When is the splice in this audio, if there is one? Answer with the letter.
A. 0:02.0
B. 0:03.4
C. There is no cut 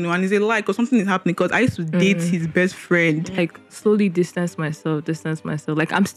B